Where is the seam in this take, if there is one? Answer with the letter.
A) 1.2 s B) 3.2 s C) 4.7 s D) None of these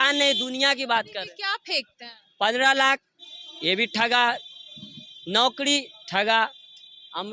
D